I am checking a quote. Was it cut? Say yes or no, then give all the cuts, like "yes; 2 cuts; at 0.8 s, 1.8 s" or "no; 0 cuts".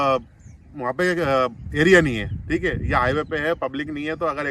no; 0 cuts